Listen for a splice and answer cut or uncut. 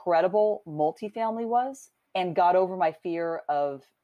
uncut